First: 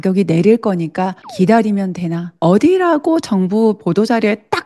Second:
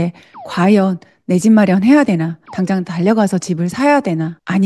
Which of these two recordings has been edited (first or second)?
first